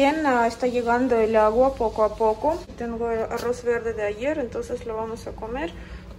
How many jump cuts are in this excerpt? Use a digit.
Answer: 1